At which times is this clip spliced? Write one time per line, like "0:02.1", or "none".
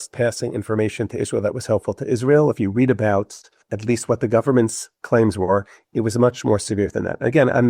0:03.7